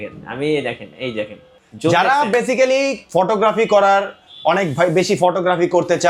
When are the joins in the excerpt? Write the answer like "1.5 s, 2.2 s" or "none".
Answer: none